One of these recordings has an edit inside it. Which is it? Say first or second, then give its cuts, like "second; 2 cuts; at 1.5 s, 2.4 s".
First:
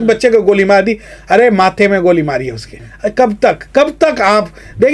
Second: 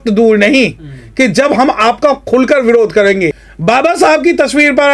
second; 1 cut; at 3.5 s